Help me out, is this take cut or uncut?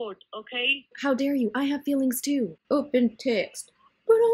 cut